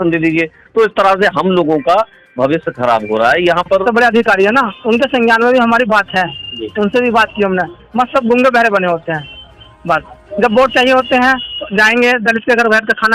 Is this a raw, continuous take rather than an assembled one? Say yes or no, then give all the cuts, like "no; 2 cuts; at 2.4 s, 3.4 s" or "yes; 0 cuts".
no; 1 cut; at 3.8 s